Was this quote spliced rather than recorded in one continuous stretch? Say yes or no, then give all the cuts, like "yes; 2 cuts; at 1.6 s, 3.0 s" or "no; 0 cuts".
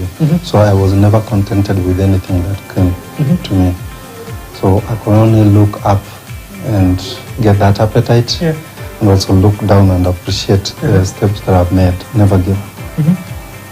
yes; 1 cut; at 12.0 s